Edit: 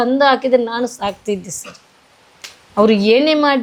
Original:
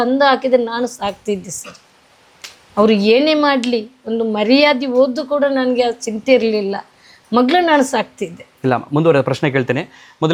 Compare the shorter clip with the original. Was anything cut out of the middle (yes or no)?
no